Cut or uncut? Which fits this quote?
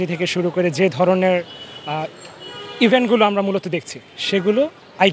uncut